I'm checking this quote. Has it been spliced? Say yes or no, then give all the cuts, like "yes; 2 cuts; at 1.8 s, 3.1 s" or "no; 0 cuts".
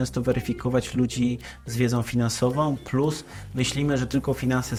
no; 0 cuts